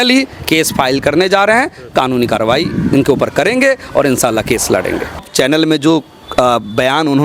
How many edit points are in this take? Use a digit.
1